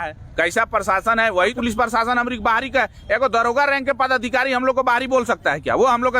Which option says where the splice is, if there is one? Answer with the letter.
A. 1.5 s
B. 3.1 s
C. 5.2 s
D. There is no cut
A